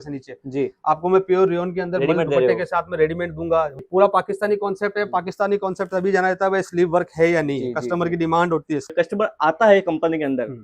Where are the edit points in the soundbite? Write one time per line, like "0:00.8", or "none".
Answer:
0:03.8
0:08.9